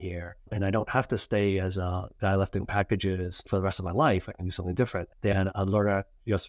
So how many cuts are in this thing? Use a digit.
1